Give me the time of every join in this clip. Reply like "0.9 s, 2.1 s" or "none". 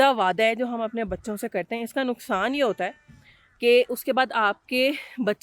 none